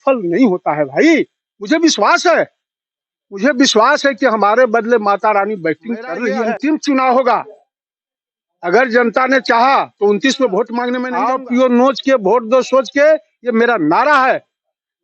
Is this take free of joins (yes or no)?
no